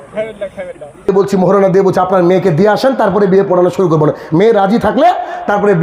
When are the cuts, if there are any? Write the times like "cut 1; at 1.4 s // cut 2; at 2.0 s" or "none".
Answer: cut 1; at 1.1 s